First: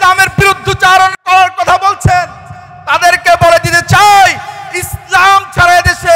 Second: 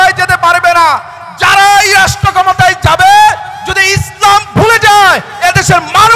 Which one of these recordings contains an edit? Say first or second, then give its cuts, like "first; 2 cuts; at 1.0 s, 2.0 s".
first; 1 cut; at 1.2 s